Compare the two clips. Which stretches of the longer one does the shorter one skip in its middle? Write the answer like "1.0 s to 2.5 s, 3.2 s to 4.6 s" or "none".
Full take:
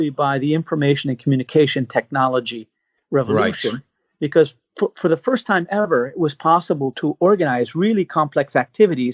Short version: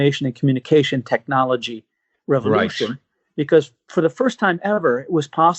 4.7 s to 4.9 s